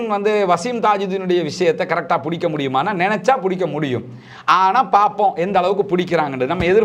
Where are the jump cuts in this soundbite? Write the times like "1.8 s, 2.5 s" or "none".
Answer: none